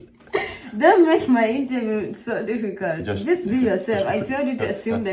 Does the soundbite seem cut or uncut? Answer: uncut